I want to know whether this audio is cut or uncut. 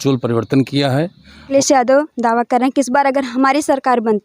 cut